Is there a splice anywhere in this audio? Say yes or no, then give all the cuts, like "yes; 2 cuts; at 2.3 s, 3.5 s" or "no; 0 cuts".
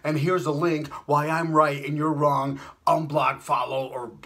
no; 0 cuts